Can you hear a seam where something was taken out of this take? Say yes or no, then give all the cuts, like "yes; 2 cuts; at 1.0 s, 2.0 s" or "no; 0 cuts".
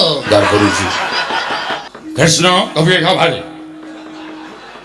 yes; 1 cut; at 1.6 s